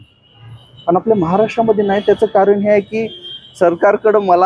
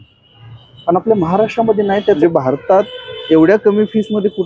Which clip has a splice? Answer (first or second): second